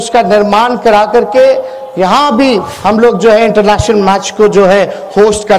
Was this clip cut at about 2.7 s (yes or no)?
yes